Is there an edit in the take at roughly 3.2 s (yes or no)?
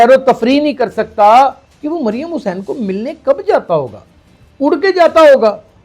no